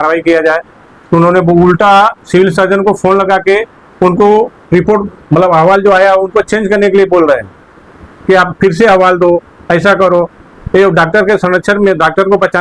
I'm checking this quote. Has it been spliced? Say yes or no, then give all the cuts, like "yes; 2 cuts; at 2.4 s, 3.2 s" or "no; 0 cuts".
no; 0 cuts